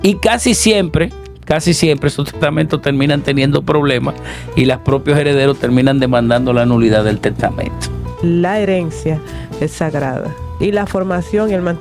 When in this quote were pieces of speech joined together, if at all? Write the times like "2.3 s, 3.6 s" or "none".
8.1 s, 10.4 s